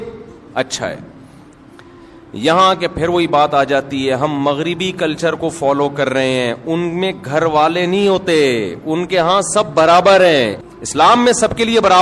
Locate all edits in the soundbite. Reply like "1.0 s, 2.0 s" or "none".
10.6 s